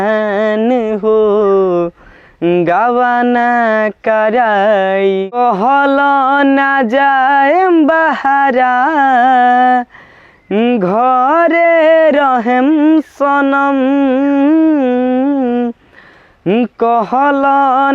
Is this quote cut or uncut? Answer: cut